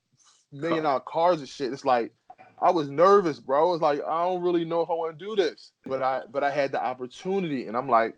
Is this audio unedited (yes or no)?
no